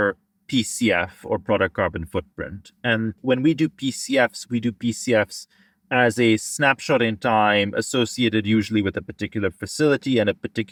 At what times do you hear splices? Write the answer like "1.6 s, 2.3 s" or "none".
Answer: none